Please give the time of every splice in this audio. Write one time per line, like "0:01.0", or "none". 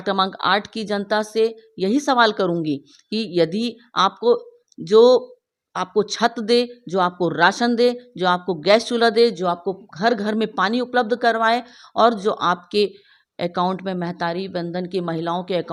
none